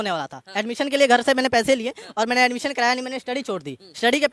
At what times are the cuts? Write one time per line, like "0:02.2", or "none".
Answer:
none

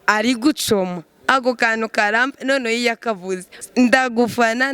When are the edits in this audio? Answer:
0:03.7

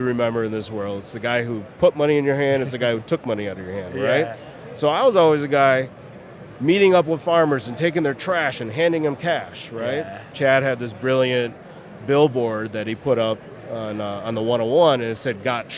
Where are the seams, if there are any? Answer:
0:10.2

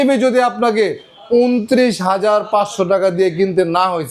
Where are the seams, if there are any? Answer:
none

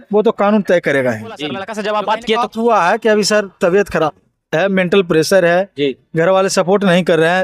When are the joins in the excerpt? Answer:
0:01.7

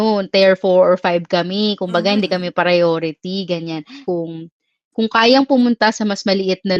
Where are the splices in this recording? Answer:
0:03.9

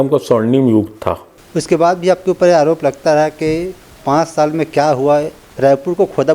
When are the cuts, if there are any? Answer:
0:01.3

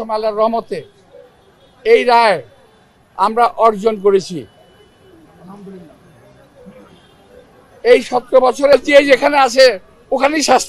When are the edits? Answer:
0:08.7

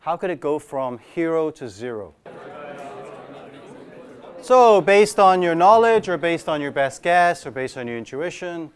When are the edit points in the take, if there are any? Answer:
none

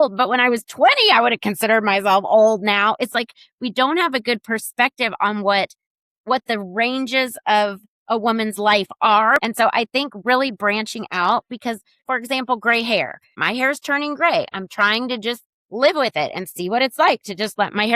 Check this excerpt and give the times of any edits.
0:09.4
0:12.0
0:13.4

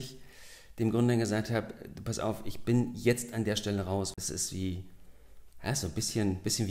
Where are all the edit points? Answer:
0:04.1

